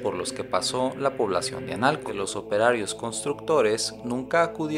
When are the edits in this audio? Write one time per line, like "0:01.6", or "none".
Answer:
0:02.1